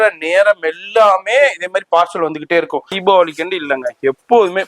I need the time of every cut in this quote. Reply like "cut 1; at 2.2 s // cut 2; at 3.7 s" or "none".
cut 1; at 2.9 s